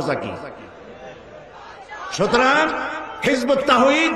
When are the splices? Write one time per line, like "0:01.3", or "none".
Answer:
0:01.9